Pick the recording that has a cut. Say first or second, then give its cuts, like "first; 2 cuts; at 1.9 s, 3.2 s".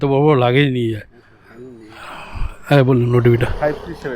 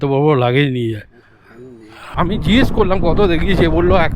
second; 1 cut; at 2.0 s